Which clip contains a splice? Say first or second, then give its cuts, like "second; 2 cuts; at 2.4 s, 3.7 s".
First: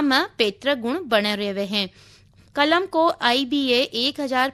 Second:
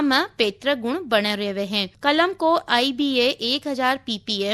second; 1 cut; at 1.9 s